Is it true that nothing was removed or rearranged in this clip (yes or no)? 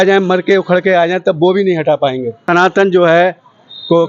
no